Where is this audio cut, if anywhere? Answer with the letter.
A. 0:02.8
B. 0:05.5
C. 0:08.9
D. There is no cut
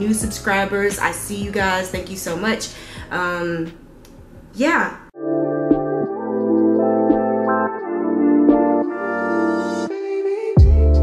B